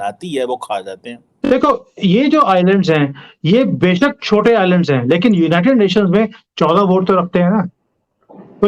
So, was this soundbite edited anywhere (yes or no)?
yes